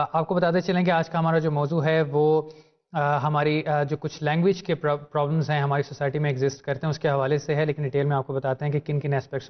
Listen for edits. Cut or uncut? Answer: uncut